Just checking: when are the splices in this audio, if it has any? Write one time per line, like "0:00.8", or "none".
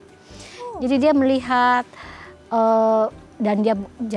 none

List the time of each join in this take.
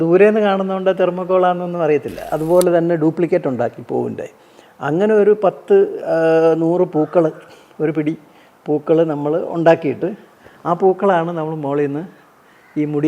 0:02.3

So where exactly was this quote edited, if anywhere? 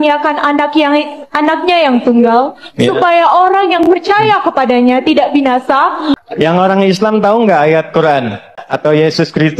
0:06.2
0:08.6

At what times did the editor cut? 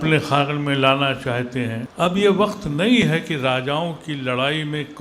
0:01.8

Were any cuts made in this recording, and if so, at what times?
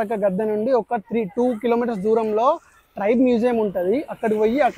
none

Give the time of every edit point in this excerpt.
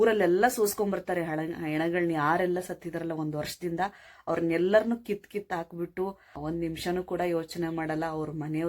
0:06.3

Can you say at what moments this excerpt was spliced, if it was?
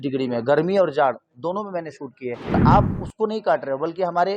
0:02.5

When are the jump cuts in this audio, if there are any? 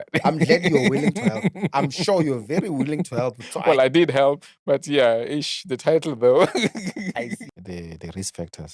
0:07.4

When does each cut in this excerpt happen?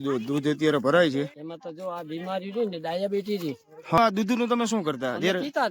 0:01.4
0:04.0

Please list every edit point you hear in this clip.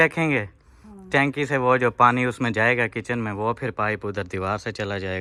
none

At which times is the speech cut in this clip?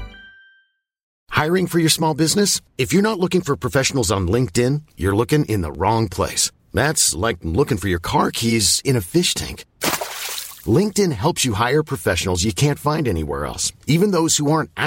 0:01.2

